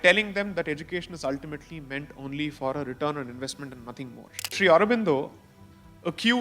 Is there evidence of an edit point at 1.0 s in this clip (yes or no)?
no